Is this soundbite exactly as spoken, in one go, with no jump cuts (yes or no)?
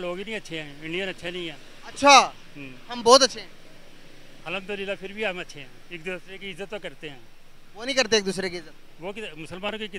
yes